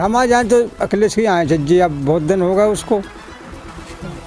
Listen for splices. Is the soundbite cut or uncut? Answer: uncut